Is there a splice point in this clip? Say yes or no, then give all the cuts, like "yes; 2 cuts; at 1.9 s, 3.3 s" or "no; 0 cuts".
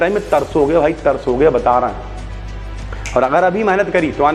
no; 0 cuts